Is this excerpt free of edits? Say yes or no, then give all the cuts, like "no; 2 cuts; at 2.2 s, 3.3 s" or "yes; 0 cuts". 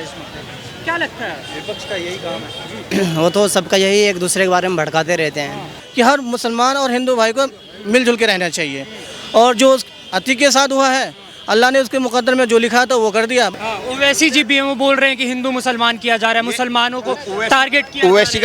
no; 2 cuts; at 5.8 s, 13.5 s